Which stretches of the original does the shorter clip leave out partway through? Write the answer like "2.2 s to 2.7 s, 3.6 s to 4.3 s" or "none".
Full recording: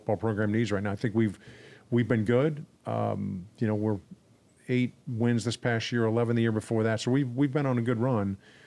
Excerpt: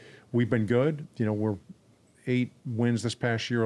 2.6 s to 3.5 s